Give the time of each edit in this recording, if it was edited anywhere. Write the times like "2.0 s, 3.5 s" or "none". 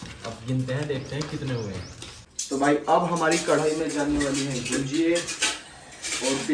2.0 s

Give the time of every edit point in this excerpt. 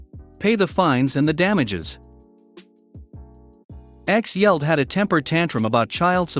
2.5 s, 3.9 s

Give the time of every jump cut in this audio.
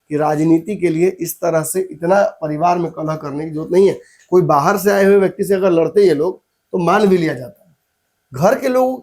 none

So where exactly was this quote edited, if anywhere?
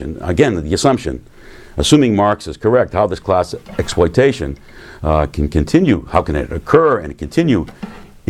3.3 s

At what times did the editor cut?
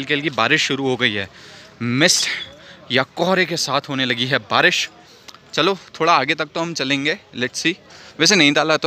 none

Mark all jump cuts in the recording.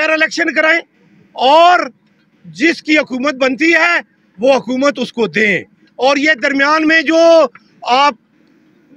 none

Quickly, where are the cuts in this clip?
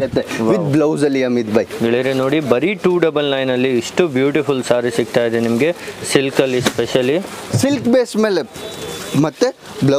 none

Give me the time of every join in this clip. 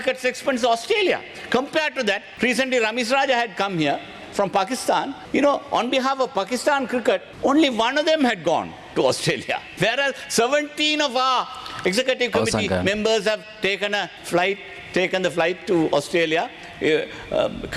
2.3 s, 5.2 s, 7.3 s, 9.6 s, 14.2 s

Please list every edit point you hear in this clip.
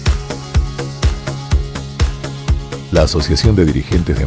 2.5 s

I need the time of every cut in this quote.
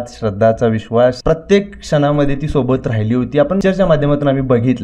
1.2 s, 3.6 s

